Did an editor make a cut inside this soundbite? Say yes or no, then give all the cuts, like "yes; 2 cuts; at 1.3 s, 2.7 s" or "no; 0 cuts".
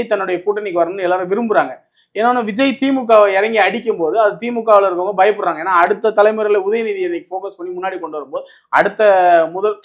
no; 0 cuts